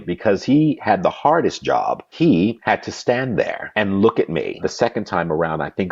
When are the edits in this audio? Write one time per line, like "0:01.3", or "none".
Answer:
0:02.3
0:03.6
0:04.6